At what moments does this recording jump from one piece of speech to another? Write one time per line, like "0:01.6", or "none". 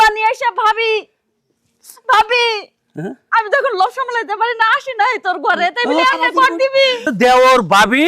0:07.1